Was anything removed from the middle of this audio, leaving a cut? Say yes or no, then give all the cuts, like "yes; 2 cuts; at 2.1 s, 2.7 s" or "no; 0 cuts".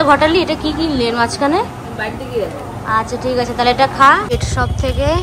yes; 1 cut; at 4.3 s